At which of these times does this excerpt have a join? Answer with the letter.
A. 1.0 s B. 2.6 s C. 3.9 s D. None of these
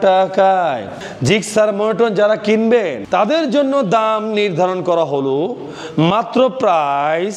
A